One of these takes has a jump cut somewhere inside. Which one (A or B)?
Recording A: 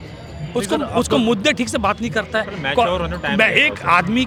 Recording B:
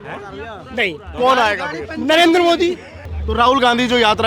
B